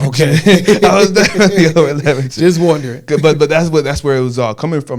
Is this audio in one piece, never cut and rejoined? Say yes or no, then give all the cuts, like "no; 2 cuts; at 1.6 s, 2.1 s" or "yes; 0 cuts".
yes; 0 cuts